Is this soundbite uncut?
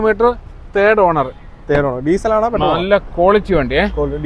yes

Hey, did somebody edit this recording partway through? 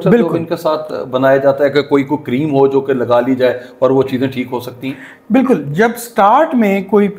no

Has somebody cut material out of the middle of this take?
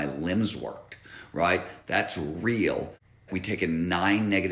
yes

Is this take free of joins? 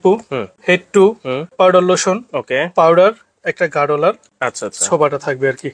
yes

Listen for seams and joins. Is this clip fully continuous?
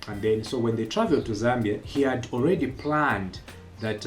no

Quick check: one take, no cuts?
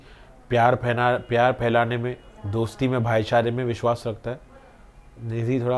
yes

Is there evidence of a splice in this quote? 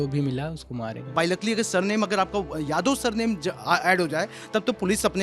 yes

